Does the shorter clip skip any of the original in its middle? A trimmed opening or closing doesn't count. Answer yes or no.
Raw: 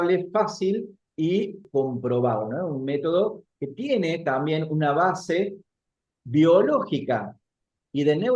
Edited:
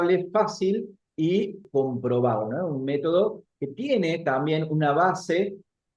no